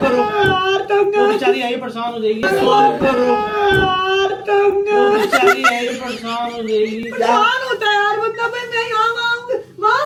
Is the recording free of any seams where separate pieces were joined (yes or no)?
yes